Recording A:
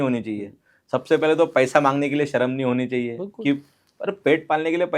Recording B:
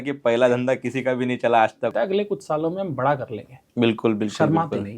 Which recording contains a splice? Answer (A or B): B